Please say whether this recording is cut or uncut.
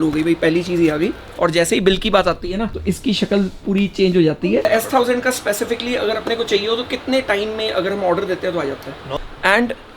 cut